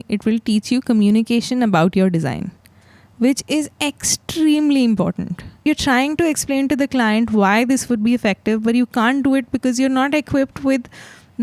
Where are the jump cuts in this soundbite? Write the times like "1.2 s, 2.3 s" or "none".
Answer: 5.6 s